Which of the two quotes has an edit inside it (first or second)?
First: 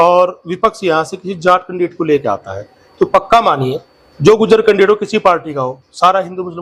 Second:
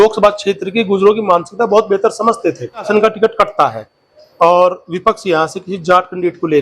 second